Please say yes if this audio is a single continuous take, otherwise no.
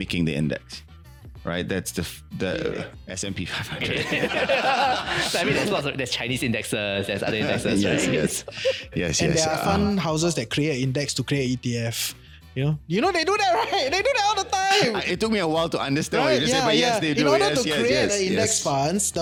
yes